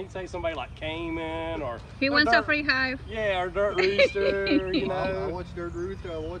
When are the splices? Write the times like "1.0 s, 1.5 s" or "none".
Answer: none